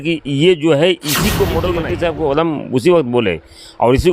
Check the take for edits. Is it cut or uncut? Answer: cut